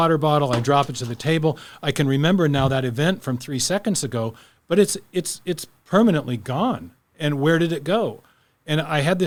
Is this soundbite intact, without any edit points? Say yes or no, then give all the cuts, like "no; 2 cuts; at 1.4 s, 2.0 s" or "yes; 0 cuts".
yes; 0 cuts